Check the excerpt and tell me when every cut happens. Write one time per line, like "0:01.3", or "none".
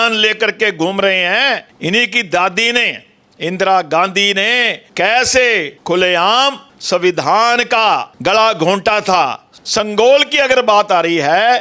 0:01.7
0:04.8
0:05.7
0:06.7
0:08.1
0:09.5